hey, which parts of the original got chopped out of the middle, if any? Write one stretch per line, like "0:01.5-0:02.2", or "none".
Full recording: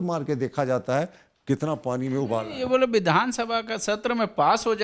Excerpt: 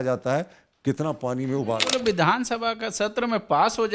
0:02.6-0:02.8